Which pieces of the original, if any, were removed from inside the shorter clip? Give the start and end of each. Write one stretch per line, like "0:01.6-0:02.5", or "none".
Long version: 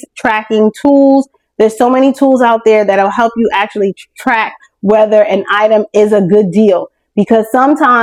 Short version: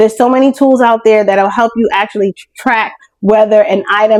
none